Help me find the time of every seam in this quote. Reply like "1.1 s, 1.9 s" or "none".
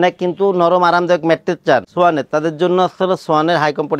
none